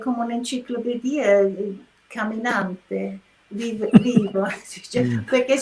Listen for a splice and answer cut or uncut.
uncut